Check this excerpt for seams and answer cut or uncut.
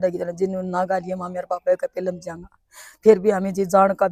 uncut